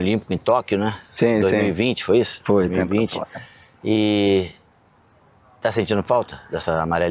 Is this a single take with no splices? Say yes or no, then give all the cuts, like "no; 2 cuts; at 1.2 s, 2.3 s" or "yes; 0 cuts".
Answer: yes; 0 cuts